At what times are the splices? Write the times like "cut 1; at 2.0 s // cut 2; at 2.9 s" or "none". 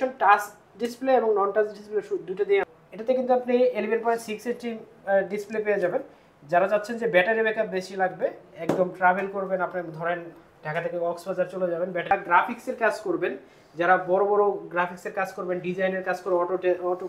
cut 1; at 2.7 s // cut 2; at 12.1 s

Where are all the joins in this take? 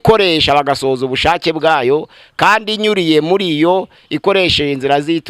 none

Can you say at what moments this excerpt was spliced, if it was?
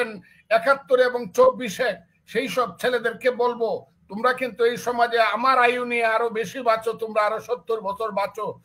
none

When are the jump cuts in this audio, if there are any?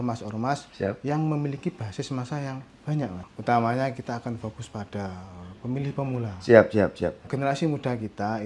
cut 1; at 3.1 s // cut 2; at 7.3 s

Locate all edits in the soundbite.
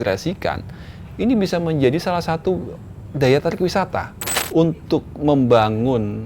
cut 1; at 4.4 s

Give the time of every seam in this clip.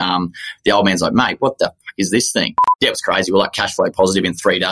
cut 1; at 2.7 s

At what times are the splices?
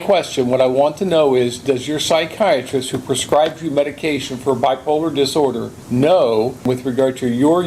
cut 1; at 5.7 s // cut 2; at 6.6 s

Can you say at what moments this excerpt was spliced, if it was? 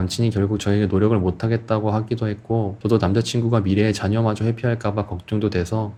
none

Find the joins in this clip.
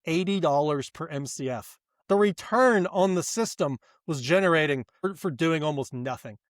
cut 1; at 2.0 s // cut 2; at 5.1 s

